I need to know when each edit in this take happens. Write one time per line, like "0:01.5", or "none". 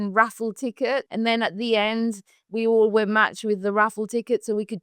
0:01.1